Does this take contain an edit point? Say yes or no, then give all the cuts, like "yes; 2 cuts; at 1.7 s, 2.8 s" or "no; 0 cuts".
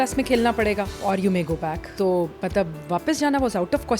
yes; 2 cuts; at 0.9 s, 1.8 s